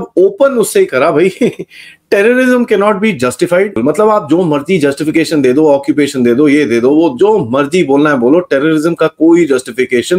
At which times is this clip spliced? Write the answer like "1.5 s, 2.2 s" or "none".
3.7 s